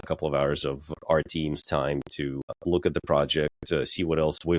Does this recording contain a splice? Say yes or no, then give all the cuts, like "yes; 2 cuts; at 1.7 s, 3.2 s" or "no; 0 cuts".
yes; 2 cuts; at 0.9 s, 2.6 s